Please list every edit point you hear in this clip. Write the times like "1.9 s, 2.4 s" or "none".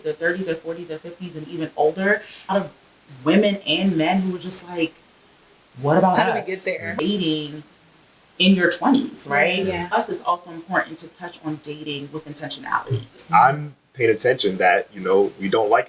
2.5 s, 6.9 s, 9.9 s, 13.2 s